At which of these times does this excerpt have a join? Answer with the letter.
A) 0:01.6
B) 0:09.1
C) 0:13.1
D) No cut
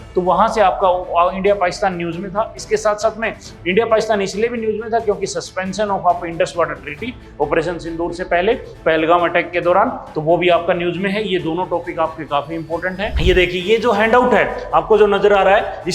C